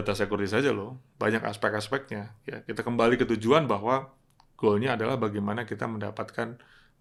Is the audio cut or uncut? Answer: uncut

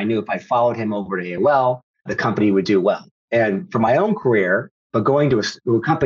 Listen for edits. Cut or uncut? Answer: cut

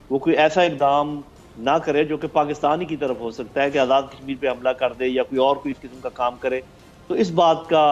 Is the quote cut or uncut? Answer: uncut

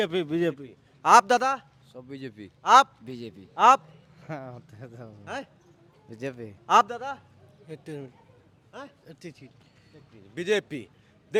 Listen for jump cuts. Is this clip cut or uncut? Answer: uncut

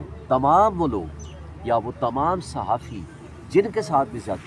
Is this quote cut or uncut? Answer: uncut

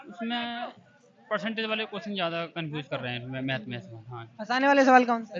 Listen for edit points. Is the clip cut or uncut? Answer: uncut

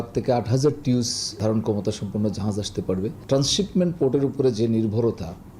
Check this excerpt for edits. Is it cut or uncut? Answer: cut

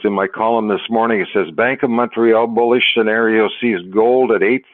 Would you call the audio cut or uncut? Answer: uncut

